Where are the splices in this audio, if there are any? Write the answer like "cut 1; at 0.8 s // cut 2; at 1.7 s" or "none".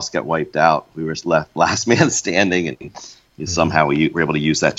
none